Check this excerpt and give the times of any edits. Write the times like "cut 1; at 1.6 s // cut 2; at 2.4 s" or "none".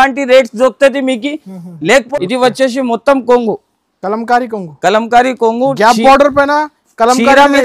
cut 1; at 2.1 s